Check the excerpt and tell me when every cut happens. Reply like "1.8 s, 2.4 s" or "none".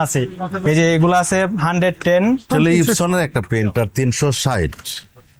2.4 s